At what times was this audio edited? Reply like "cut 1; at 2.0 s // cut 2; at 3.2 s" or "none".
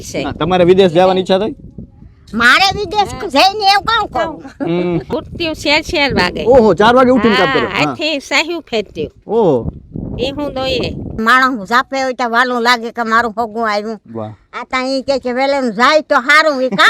cut 1; at 5.1 s // cut 2; at 11.2 s